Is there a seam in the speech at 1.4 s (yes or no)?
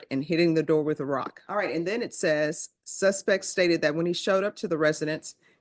yes